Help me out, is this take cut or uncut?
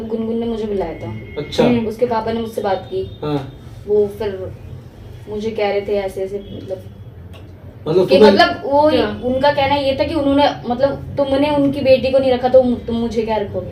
uncut